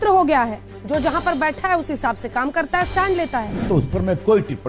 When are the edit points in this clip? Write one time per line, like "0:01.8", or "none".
0:03.6